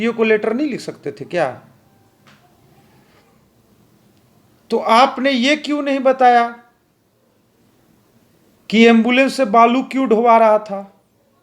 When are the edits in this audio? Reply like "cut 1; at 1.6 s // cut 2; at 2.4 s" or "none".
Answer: cut 1; at 3.4 s

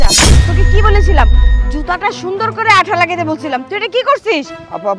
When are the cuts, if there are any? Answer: none

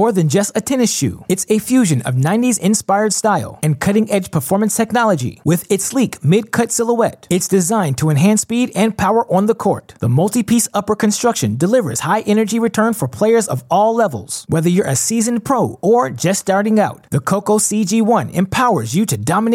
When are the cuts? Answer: none

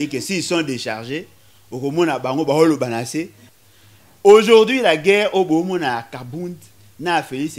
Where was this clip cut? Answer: cut 1; at 3.4 s

